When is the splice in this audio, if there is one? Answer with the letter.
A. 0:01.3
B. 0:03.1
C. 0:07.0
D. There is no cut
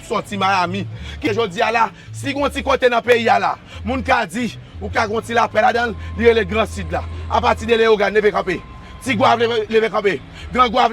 A